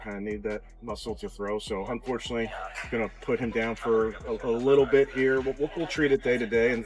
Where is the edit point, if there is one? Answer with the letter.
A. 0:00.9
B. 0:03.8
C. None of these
C